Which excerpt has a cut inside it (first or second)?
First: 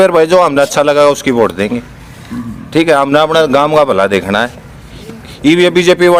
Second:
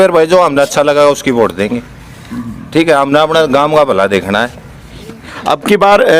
second